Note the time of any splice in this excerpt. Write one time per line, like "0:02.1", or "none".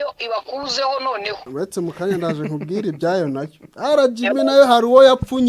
0:01.4